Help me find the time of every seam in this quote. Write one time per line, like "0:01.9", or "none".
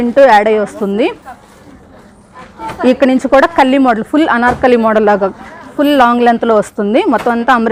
none